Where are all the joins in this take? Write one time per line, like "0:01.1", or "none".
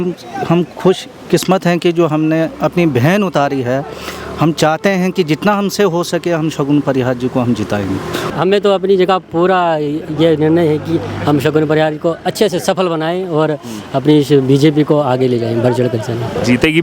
0:08.3